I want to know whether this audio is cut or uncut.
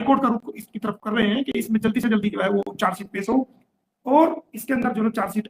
uncut